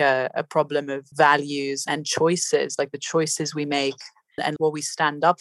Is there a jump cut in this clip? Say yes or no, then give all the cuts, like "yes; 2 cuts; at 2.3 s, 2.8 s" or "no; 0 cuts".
yes; 2 cuts; at 1.1 s, 4.5 s